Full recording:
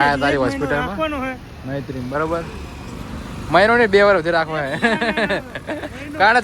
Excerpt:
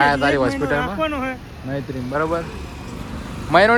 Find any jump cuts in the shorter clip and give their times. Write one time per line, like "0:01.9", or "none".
none